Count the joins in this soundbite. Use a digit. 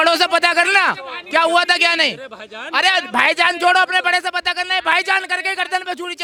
0